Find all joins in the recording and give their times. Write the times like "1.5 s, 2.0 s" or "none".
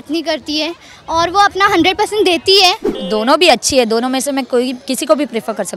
2.9 s